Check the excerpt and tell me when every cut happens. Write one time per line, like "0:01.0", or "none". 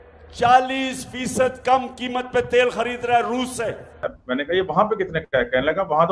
0:04.1